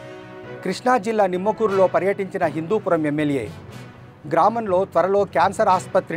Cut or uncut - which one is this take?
uncut